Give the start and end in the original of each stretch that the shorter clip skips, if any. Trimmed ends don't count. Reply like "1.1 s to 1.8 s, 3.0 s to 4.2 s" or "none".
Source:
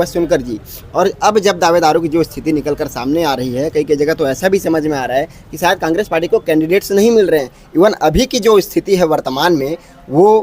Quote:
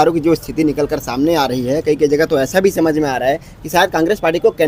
none